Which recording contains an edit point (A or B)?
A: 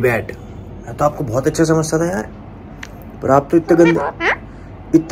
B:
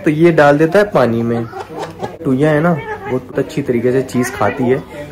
B